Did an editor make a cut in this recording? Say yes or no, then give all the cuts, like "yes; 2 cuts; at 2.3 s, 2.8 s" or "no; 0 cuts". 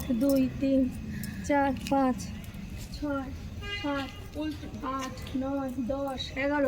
no; 0 cuts